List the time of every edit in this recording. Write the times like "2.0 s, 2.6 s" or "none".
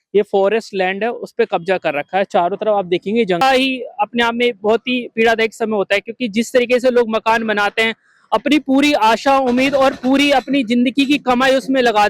3.4 s